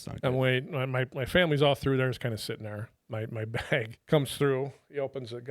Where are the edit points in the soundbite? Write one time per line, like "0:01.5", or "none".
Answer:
0:02.9
0:04.0